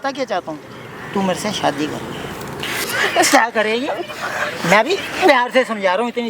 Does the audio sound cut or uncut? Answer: cut